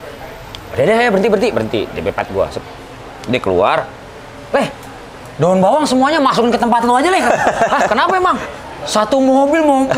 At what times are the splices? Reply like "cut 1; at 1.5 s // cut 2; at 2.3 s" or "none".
none